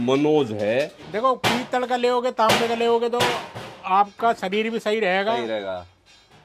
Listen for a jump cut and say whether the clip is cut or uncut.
cut